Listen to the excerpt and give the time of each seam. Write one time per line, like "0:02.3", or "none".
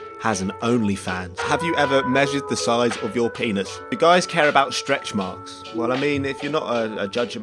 0:01.3
0:03.9